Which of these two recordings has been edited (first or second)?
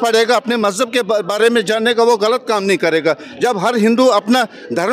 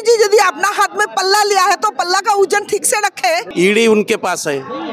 second